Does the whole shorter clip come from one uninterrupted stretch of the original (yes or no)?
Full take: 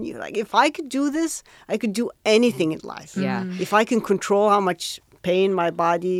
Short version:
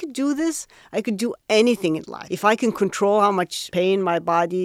no